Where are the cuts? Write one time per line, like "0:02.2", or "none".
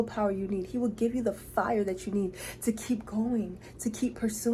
none